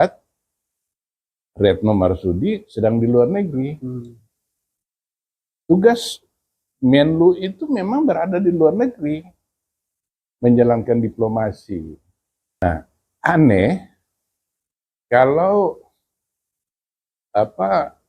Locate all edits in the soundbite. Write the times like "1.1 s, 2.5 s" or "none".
12.6 s